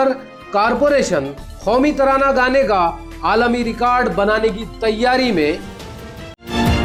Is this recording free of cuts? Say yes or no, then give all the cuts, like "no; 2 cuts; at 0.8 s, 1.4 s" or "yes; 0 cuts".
yes; 0 cuts